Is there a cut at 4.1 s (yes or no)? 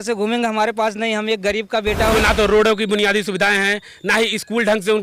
no